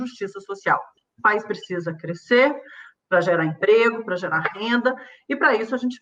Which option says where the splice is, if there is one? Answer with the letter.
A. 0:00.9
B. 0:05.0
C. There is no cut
A